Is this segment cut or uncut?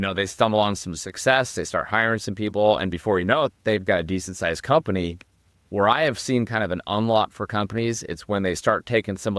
uncut